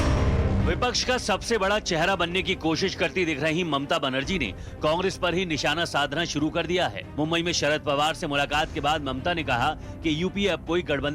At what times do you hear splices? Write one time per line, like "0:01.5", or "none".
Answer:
0:01.1